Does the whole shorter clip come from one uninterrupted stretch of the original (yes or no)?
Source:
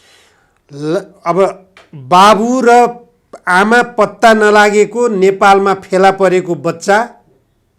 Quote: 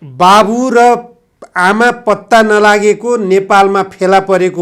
yes